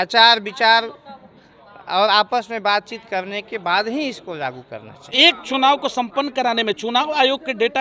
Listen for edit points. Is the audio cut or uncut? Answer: cut